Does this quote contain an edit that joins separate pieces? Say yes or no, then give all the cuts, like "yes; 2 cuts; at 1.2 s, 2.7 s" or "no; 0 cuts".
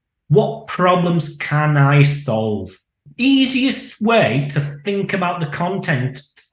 yes; 1 cut; at 3.0 s